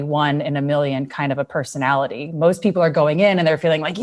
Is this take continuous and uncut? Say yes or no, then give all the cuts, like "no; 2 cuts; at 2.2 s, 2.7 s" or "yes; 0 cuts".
yes; 0 cuts